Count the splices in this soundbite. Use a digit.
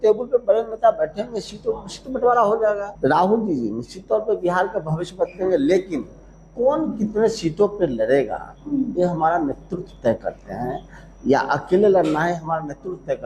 1